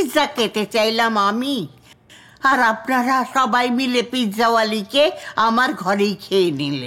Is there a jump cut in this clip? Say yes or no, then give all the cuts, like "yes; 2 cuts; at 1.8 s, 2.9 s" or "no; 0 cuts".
no; 0 cuts